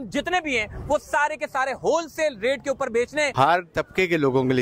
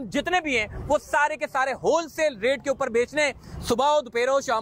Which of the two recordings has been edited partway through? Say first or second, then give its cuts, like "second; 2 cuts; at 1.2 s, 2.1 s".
first; 1 cut; at 3.3 s